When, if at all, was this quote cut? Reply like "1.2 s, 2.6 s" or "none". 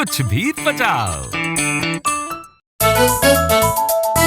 2.7 s